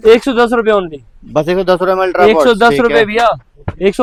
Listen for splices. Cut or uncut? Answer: uncut